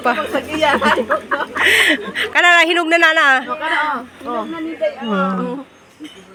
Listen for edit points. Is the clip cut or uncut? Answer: uncut